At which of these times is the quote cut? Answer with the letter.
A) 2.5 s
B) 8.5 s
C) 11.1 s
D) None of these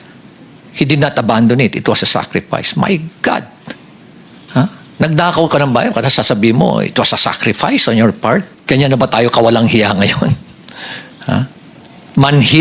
B